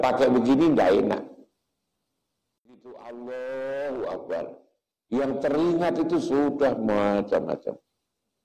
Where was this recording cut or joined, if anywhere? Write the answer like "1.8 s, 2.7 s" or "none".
2.9 s